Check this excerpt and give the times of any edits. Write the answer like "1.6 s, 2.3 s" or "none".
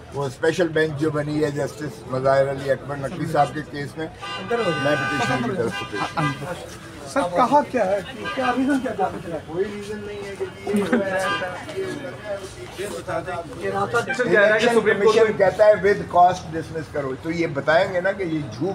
14.1 s